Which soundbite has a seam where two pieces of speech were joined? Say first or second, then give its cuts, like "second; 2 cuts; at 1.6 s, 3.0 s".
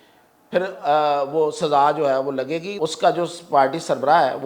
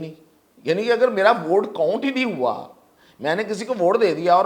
first; 1 cut; at 2.7 s